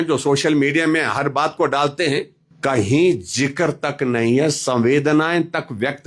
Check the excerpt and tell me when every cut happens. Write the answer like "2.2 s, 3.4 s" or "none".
2.4 s